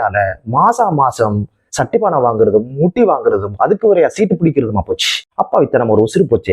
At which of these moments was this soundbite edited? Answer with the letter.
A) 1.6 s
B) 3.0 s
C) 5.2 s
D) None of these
C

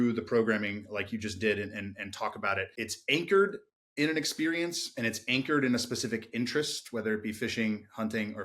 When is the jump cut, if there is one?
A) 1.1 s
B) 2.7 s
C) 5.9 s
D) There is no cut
B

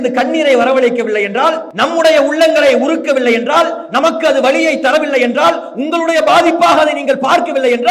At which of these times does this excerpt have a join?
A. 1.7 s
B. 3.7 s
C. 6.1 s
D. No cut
A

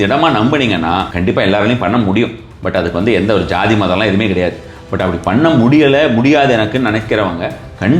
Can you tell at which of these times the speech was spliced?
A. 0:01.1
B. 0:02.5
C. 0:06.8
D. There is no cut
A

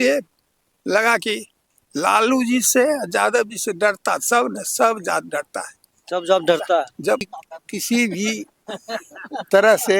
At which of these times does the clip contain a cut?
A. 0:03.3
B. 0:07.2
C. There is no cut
B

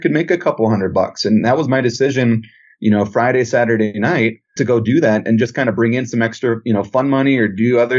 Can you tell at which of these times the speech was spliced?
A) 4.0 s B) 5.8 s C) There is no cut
A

